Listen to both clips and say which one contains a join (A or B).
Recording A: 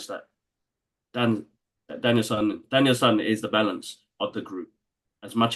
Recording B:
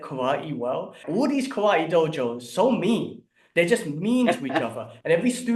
B